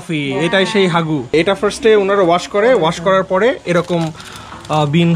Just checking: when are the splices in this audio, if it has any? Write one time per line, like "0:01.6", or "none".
0:01.3